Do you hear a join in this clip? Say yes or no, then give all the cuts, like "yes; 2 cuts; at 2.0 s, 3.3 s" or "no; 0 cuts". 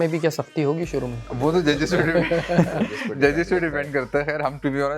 yes; 1 cut; at 1.2 s